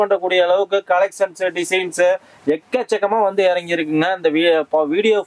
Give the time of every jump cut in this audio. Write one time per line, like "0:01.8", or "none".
none